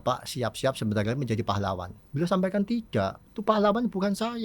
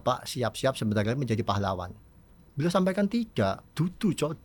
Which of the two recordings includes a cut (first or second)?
first